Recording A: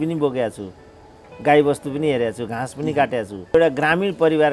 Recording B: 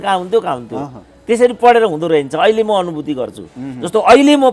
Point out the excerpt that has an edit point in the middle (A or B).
A